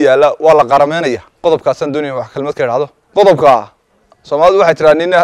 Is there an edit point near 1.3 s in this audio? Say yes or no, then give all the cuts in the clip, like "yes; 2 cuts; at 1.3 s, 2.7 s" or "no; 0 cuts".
yes; 2 cuts; at 1.3 s, 3.0 s